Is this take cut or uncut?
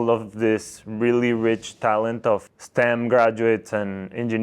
cut